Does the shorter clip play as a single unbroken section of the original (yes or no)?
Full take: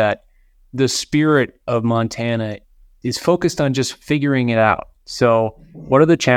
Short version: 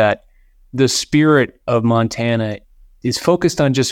yes